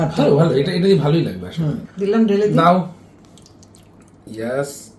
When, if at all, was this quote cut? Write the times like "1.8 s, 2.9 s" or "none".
1.8 s